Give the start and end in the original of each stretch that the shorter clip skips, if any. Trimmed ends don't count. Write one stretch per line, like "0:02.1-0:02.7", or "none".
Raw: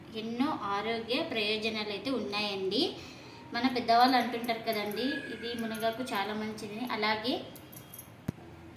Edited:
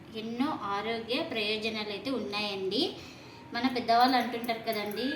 none